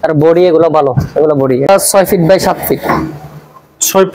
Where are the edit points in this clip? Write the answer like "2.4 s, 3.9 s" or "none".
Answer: 1.7 s